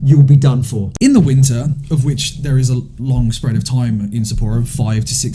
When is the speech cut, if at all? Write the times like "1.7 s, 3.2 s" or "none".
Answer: none